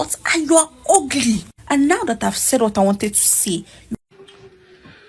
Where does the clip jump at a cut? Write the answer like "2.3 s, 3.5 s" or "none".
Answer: 4.0 s